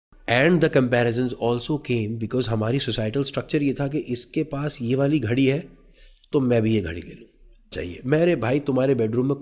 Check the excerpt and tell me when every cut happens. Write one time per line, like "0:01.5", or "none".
0:07.8